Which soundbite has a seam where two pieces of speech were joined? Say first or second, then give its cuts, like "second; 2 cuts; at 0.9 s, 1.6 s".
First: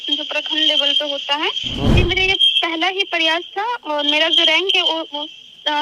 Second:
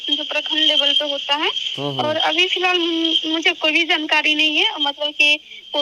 first; 1 cut; at 1.9 s